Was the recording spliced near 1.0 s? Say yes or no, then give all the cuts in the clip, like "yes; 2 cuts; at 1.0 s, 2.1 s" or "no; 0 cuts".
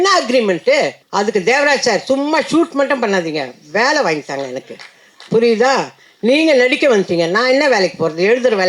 yes; 1 cut; at 1.0 s